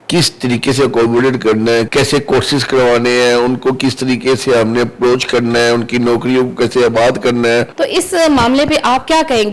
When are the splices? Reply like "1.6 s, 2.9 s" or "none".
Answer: 1.9 s, 7.7 s